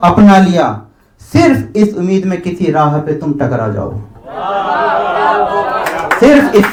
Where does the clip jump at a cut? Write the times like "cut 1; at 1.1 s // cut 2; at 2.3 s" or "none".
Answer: none